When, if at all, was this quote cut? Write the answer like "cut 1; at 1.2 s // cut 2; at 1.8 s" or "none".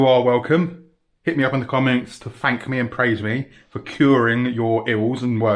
none